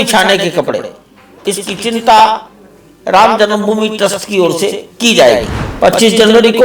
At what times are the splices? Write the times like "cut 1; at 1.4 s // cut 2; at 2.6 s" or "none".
cut 1; at 5.6 s